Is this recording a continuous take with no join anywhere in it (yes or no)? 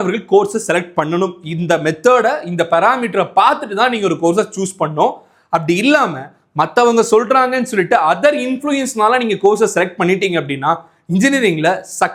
yes